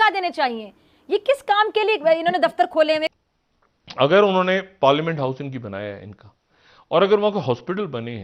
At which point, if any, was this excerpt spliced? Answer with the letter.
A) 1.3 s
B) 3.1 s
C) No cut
B